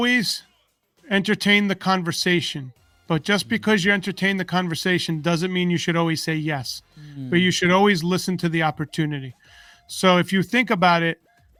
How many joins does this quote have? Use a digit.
0